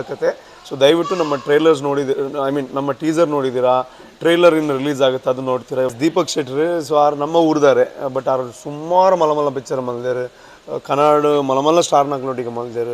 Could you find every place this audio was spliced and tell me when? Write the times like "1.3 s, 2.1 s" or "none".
6.1 s